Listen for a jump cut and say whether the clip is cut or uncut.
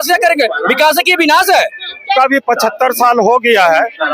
cut